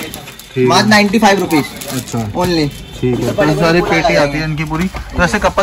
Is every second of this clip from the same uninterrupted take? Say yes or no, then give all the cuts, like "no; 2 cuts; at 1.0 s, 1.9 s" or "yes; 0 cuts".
yes; 0 cuts